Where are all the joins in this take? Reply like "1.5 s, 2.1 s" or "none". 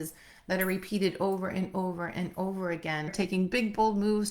3.1 s